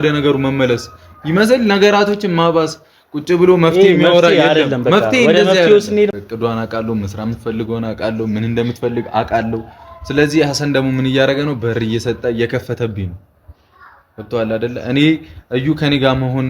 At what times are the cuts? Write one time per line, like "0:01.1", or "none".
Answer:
0:06.1